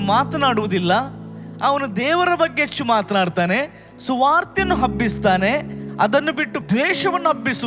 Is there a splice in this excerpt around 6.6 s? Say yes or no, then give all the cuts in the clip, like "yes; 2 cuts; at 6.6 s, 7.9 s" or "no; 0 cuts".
yes; 1 cut; at 6.6 s